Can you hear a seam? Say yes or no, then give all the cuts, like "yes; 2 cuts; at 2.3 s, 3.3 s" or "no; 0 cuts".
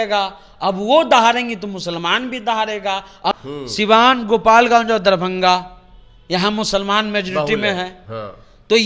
yes; 1 cut; at 3.3 s